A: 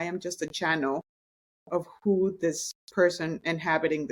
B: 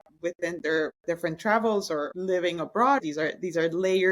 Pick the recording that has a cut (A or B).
B